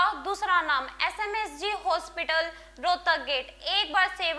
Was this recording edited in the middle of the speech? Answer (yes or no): no